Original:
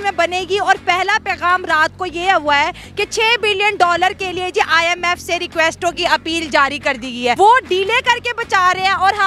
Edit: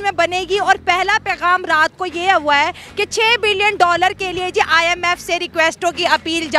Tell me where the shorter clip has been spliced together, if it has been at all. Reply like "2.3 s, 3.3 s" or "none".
none